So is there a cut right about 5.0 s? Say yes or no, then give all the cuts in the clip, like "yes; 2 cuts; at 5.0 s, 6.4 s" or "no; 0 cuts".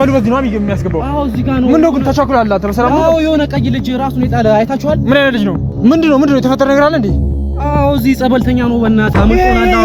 no; 0 cuts